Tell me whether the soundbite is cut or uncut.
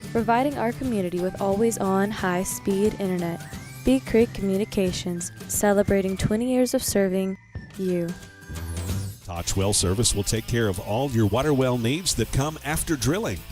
cut